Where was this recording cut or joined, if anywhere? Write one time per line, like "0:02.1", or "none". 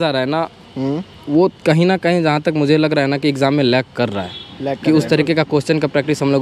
none